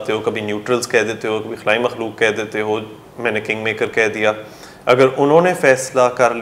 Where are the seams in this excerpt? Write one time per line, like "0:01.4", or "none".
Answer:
none